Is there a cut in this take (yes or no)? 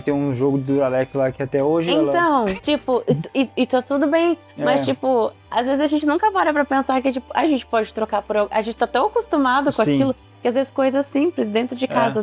no